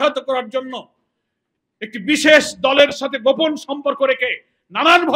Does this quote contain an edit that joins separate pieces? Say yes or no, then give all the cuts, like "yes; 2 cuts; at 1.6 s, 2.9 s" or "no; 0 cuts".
no; 0 cuts